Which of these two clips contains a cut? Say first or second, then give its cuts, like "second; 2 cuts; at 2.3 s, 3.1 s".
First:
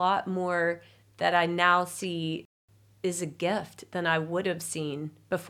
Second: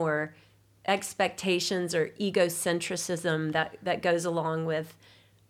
first; 1 cut; at 2.4 s